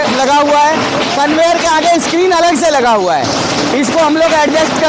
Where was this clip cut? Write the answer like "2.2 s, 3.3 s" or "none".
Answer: none